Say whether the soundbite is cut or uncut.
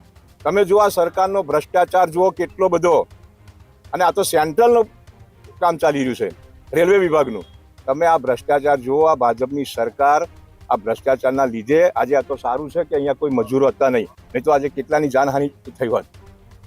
uncut